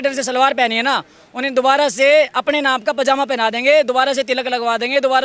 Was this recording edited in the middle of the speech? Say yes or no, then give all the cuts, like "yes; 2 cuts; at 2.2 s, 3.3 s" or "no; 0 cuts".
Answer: no; 0 cuts